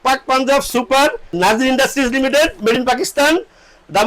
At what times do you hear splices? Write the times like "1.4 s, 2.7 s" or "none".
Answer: 1.4 s